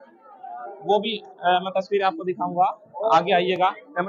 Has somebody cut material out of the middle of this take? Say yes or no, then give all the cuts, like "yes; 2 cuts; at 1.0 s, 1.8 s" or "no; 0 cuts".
no; 0 cuts